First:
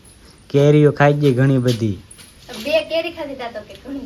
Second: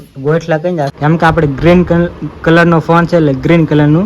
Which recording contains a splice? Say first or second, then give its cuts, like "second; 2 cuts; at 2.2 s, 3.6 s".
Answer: second; 1 cut; at 0.9 s